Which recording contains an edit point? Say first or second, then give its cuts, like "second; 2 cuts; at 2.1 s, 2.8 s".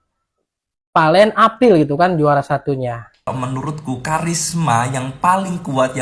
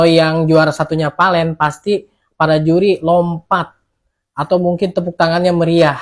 first; 1 cut; at 3.3 s